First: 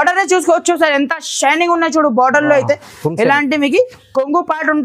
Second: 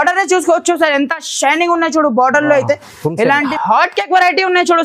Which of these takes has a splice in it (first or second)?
second